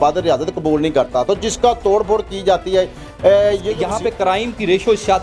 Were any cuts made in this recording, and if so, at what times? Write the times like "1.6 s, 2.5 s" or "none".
3.7 s